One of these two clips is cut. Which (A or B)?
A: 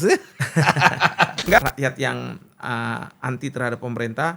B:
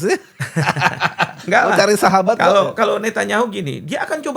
A